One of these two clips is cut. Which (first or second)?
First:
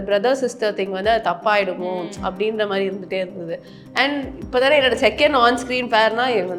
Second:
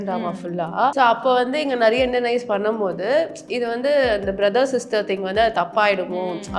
second